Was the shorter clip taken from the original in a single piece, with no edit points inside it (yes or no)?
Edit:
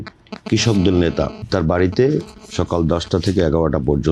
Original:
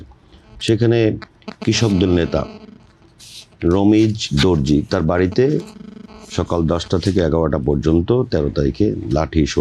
no